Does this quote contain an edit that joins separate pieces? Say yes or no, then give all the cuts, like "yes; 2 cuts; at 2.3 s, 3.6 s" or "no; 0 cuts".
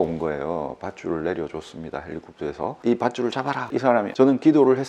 yes; 1 cut; at 2.8 s